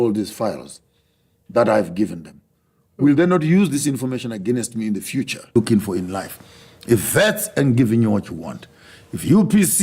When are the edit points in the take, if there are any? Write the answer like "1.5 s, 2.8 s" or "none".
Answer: 5.5 s